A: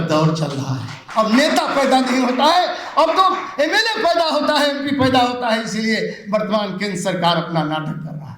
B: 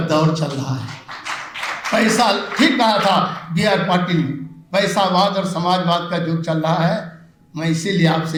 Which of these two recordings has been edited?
A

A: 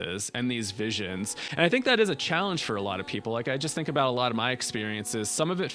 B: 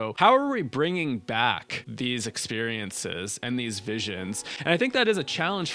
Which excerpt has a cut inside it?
B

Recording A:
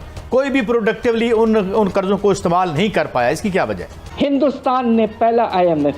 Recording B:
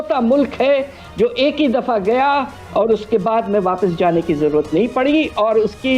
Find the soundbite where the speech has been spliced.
A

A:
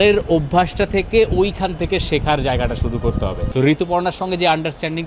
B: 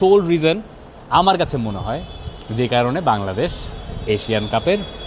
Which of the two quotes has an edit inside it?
A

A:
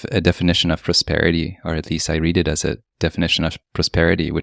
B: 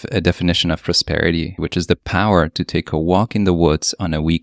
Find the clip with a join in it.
B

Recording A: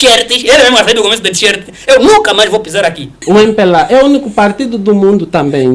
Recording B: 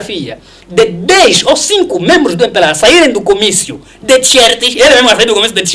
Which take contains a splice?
A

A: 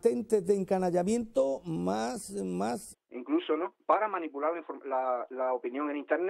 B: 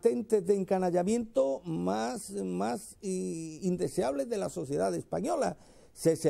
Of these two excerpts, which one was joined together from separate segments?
B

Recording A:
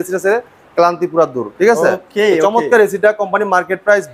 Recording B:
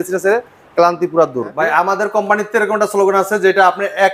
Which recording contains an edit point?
B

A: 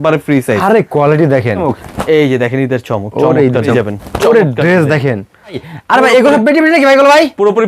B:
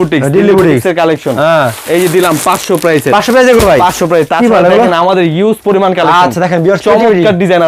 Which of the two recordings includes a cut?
A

